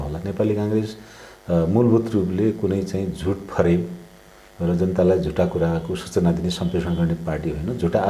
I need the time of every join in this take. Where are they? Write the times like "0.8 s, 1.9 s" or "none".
none